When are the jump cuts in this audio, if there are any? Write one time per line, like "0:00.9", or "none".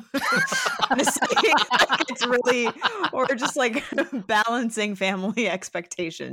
none

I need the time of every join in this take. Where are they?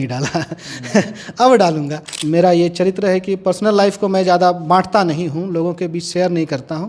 0:02.1

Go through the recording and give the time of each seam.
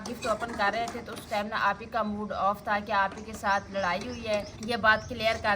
0:04.5

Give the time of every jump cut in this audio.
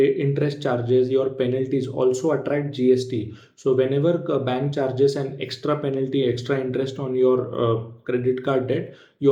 none

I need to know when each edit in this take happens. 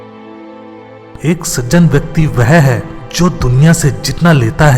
0:01.1

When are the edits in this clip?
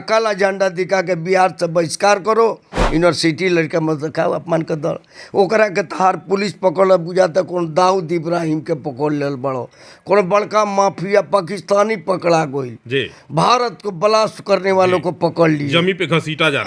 0:02.7

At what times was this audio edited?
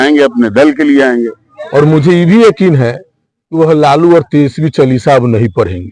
0:01.6

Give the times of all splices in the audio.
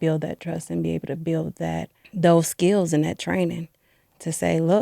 0:02.0

